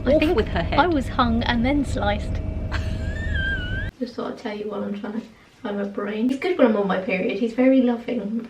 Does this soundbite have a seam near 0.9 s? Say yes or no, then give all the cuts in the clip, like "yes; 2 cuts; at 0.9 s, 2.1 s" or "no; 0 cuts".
no; 2 cuts; at 3.9 s, 6.3 s